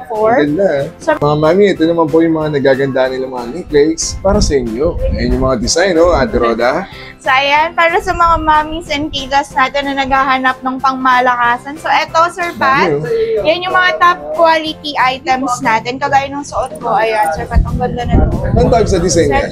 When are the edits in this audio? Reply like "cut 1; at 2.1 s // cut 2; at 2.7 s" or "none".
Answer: cut 1; at 1.2 s